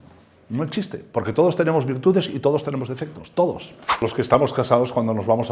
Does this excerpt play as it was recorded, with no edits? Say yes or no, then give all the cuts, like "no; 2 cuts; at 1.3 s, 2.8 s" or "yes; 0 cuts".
no; 1 cut; at 4.0 s